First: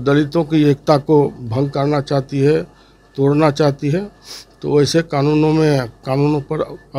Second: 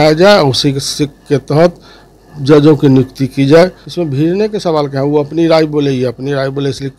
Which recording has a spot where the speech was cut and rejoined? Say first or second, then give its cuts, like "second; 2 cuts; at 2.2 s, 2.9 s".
second; 1 cut; at 3.9 s